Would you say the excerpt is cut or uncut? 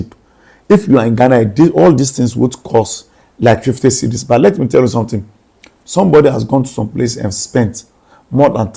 uncut